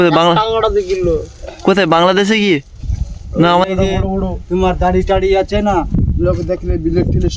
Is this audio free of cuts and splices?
no; 1 cut; at 3.7 s

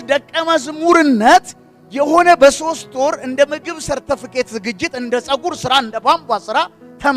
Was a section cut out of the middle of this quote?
no; 0 cuts

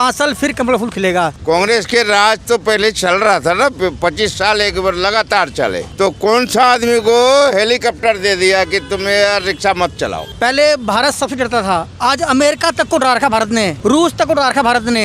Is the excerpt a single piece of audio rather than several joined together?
no; 4 cuts; at 1.4 s, 5.9 s, 10.2 s, 13.7 s

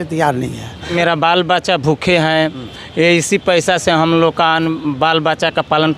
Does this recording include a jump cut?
yes; 1 cut; at 0.9 s

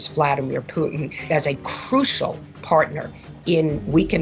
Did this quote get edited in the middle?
yes; 1 cut; at 1.2 s

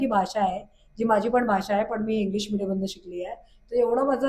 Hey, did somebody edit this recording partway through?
no; 0 cuts

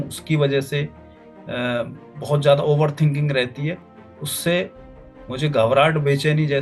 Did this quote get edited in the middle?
no; 0 cuts

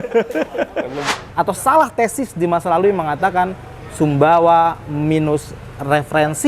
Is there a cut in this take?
yes; 1 cut; at 1.1 s

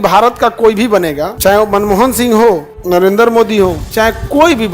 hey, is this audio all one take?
no; 3 cuts; at 1.3 s, 2.7 s, 3.8 s

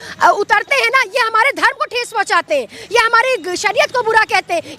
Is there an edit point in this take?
no; 0 cuts

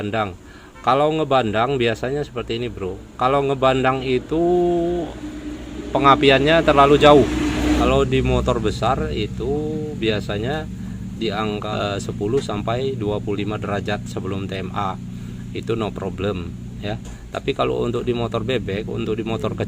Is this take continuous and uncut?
no; 2 cuts; at 7.7 s, 11.6 s

